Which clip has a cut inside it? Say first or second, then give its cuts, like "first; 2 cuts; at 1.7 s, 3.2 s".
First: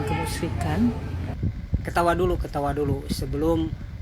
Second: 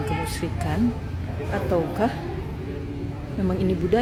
first; 1 cut; at 1.3 s